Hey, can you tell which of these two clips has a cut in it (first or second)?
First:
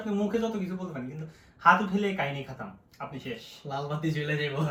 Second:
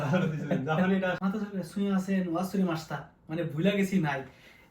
second